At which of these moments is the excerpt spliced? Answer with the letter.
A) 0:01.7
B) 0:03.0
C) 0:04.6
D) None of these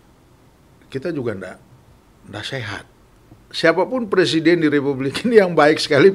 B